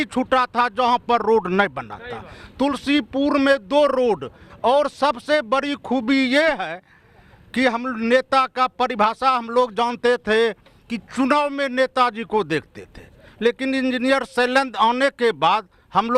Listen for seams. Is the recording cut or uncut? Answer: uncut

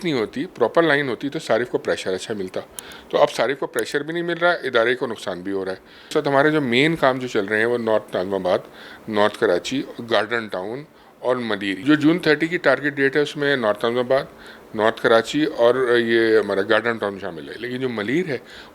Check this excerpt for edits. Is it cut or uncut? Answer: cut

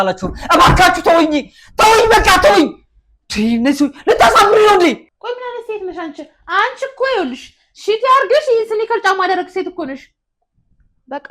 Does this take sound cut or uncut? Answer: cut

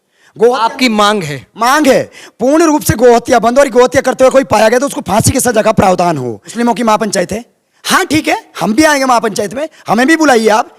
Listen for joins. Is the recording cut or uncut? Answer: cut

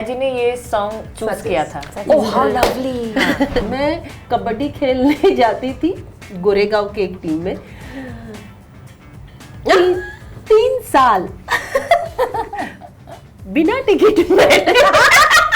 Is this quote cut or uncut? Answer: cut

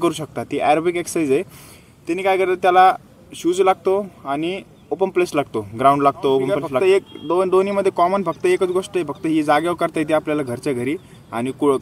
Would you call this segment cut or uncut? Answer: cut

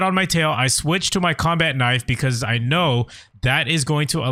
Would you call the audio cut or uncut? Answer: uncut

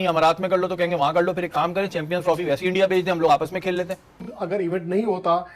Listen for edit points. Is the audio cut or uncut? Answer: cut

